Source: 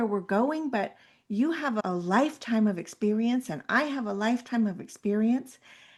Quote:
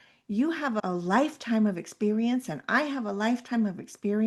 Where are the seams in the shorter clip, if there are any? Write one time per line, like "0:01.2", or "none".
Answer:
none